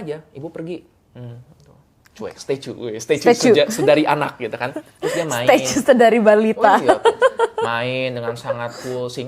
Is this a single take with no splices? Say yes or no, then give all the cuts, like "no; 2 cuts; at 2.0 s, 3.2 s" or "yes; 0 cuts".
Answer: yes; 0 cuts